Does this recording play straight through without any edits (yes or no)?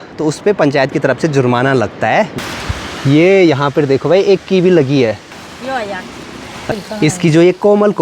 no